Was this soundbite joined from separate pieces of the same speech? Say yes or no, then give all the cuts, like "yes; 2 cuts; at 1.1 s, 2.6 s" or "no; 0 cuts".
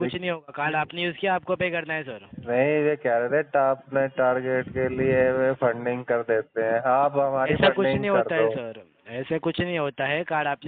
no; 0 cuts